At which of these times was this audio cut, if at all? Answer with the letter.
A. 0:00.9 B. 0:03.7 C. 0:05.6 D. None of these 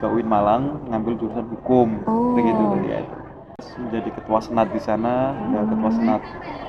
B